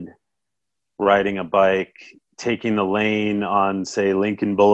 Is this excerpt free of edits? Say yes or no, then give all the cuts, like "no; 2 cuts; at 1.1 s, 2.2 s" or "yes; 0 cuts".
yes; 0 cuts